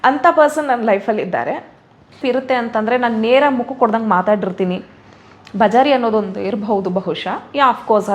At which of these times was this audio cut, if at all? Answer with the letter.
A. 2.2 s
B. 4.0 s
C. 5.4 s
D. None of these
A